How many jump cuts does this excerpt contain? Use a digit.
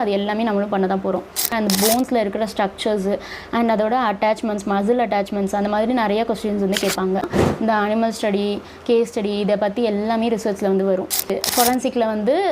3